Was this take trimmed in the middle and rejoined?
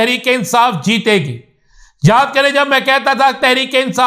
no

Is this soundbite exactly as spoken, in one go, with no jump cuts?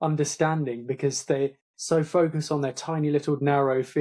yes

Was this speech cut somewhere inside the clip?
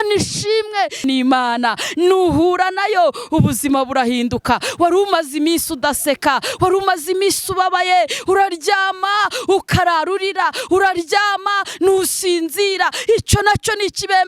yes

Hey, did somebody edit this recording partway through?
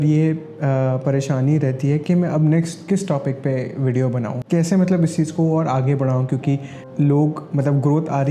no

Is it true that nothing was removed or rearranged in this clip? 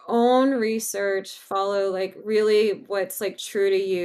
yes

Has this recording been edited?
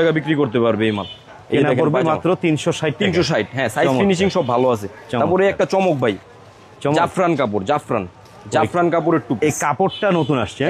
no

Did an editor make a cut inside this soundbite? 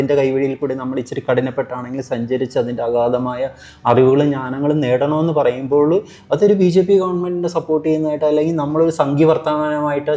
no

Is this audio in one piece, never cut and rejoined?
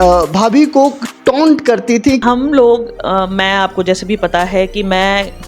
no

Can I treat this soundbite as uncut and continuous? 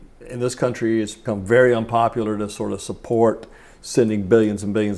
no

